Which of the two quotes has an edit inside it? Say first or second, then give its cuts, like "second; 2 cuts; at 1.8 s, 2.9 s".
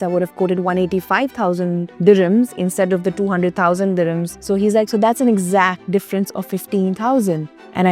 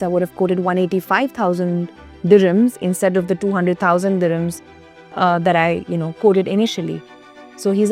first; 3 cuts; at 1.9 s, 4.3 s, 5.8 s